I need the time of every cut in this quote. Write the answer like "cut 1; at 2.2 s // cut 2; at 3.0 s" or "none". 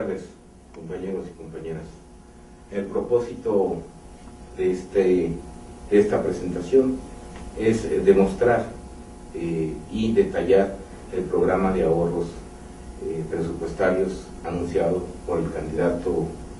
cut 1; at 13.3 s